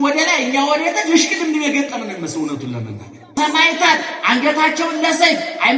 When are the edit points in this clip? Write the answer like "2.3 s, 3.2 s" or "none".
3.2 s